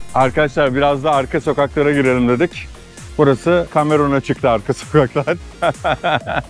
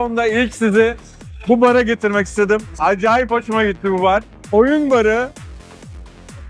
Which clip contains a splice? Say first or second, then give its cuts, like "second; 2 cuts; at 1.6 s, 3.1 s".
second; 2 cuts; at 4.4 s, 5.3 s